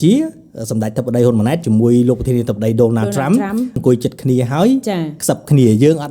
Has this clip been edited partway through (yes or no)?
yes